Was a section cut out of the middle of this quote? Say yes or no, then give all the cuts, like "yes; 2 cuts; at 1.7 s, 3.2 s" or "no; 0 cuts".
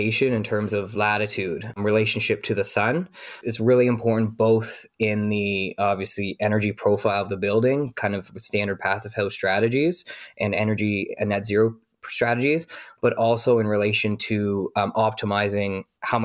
no; 0 cuts